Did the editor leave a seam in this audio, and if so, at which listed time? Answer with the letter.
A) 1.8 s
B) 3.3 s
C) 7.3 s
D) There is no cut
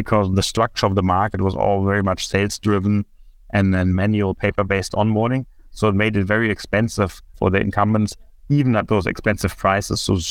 C